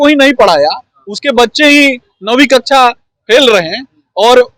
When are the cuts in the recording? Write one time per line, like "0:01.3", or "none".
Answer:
none